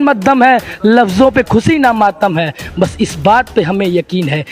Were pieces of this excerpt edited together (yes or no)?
no